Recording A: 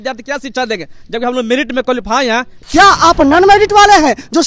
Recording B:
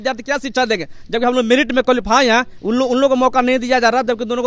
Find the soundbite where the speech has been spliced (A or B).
A